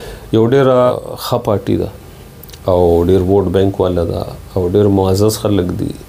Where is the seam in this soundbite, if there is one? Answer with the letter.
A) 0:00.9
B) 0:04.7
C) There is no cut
A